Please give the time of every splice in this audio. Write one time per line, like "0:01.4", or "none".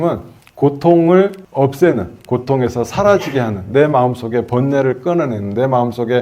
0:01.4